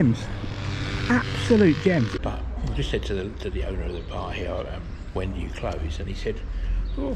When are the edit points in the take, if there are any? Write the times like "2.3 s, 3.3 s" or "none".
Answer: 2.1 s